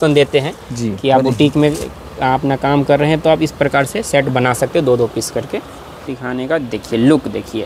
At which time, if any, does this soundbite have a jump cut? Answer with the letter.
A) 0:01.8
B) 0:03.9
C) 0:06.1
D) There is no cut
C